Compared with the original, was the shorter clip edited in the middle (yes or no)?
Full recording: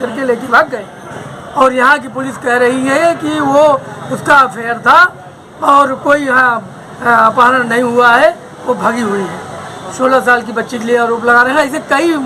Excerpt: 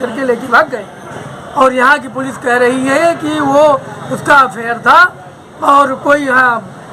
no